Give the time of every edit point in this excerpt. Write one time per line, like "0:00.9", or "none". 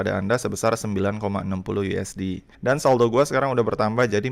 0:02.5